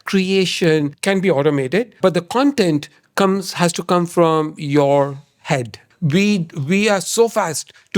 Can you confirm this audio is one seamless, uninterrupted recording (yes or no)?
no